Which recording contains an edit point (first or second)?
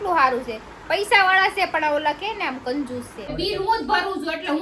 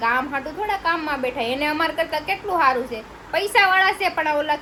first